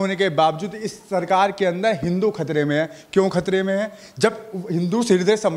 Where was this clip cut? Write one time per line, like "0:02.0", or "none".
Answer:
none